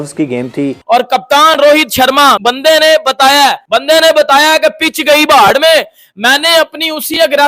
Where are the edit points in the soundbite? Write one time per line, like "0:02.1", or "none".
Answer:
none